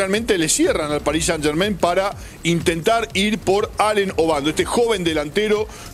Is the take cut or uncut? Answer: uncut